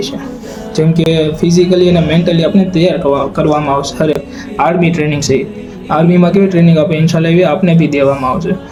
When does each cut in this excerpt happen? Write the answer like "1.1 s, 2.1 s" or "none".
none